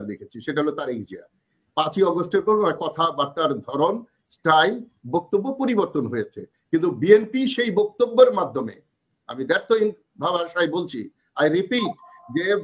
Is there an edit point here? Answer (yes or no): no